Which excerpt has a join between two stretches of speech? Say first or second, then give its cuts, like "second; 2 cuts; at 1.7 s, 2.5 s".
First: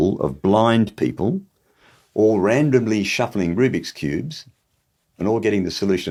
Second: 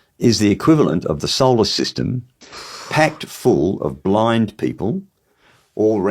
second; 1 cut; at 2.4 s